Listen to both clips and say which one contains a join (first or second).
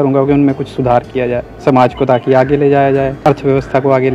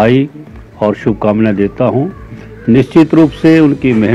first